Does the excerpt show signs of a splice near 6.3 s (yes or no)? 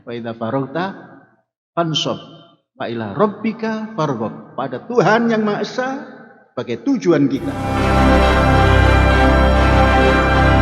no